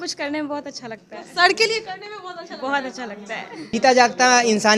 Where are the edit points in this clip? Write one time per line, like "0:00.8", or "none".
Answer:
0:03.7